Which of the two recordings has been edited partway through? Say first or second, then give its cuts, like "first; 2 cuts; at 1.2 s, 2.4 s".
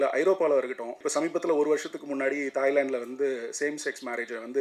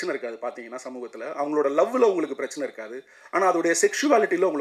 first; 1 cut; at 1.0 s